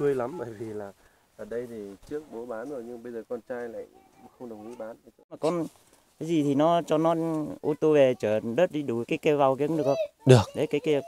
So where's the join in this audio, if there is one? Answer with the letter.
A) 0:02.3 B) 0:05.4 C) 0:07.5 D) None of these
B